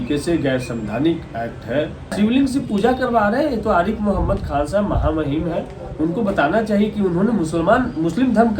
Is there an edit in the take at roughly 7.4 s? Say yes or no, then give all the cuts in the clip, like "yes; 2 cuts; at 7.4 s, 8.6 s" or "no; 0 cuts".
no; 1 cut; at 2.1 s